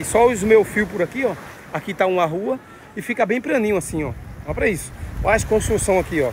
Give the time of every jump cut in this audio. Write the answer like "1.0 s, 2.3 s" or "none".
none